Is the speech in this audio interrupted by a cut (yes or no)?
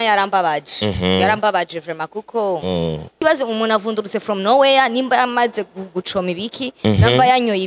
yes